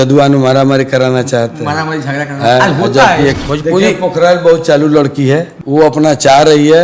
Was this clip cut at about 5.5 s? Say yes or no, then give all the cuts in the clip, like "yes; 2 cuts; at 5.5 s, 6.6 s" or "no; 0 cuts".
yes; 2 cuts; at 3.3 s, 5.5 s